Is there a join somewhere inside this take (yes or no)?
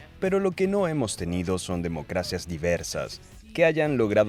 yes